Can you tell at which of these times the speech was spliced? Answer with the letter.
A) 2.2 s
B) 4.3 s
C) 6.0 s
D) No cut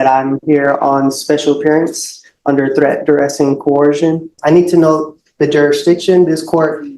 B